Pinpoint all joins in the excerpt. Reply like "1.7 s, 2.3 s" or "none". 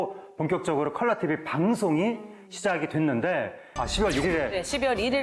3.6 s